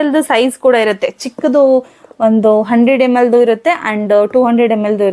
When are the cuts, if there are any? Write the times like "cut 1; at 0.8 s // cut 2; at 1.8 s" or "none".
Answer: none

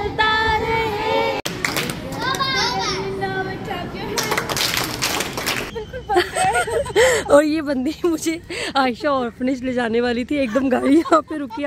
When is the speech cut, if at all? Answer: cut 1; at 5.8 s

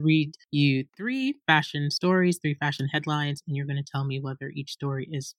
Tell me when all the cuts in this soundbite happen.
none

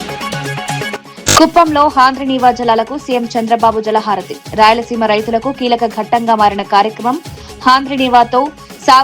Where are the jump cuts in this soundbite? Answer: cut 1; at 1.0 s

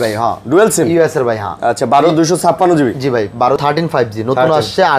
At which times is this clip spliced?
cut 1; at 3.6 s

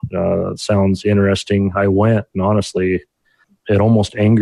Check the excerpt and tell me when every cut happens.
cut 1; at 3.5 s

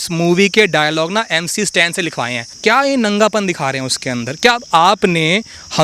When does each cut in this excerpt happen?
cut 1; at 2.5 s

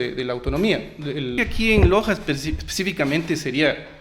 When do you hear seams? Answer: cut 1; at 1.3 s

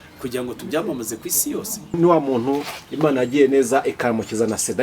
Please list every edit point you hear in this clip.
cut 1; at 2.0 s

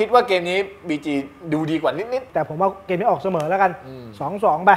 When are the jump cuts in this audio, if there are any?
cut 1; at 2.3 s

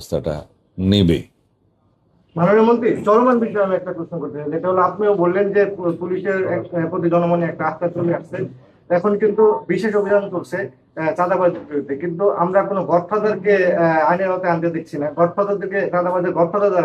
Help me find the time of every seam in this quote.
none

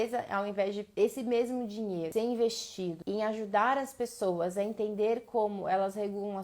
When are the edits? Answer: cut 1; at 0.8 s // cut 2; at 2.1 s // cut 3; at 3.0 s

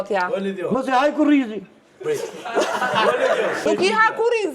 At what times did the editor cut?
cut 1; at 3.6 s

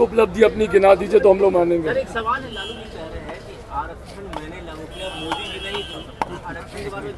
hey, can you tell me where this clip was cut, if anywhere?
none

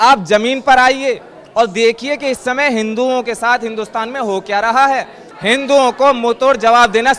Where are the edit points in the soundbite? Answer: cut 1; at 5.3 s

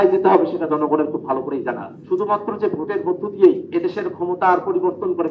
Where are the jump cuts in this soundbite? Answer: cut 1; at 1.9 s // cut 2; at 3.6 s

